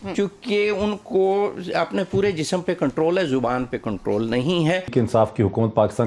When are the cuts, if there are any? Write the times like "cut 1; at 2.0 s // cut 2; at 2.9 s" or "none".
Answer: cut 1; at 4.9 s